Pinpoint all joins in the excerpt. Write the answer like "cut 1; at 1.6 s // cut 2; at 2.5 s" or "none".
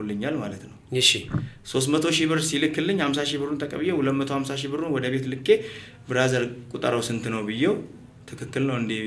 none